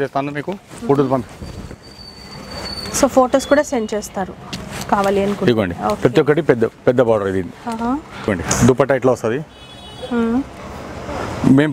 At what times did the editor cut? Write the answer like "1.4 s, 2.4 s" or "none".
8.3 s